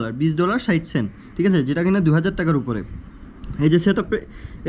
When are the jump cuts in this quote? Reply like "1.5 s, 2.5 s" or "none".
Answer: none